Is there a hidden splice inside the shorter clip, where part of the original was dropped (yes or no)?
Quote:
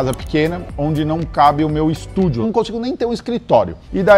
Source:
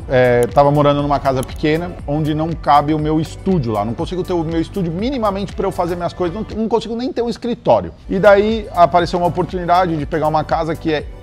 yes